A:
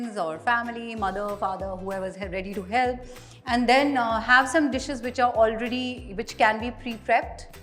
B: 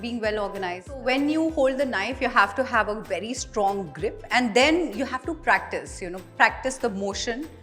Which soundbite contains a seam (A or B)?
B